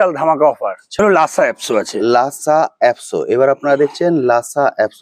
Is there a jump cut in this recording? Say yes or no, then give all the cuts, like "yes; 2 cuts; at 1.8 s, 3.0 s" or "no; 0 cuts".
yes; 1 cut; at 1.0 s